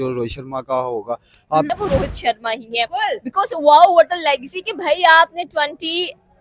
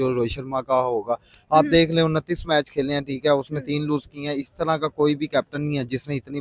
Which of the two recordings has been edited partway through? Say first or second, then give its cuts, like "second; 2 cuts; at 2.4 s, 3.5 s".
first; 1 cut; at 1.7 s